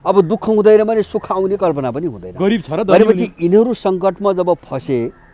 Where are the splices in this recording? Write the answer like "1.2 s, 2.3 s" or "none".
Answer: none